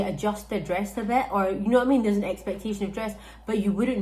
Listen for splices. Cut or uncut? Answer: uncut